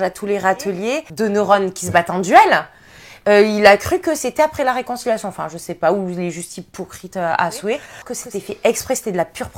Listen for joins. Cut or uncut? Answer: cut